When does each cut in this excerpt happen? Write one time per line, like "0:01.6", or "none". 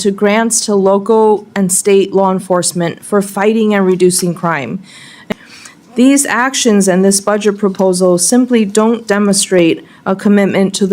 0:05.2